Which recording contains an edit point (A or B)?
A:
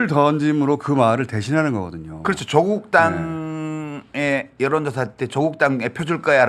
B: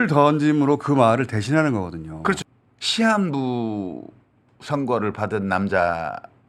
B